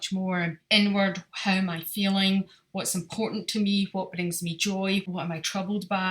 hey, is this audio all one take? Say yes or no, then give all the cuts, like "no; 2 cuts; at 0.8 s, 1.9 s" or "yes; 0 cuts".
no; 1 cut; at 5.1 s